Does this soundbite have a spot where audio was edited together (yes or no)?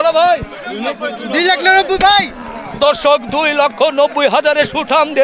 no